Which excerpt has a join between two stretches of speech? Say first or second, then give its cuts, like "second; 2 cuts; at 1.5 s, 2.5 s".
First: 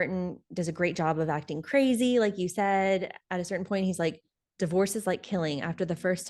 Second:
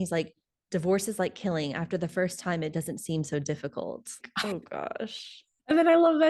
second; 1 cut; at 4.2 s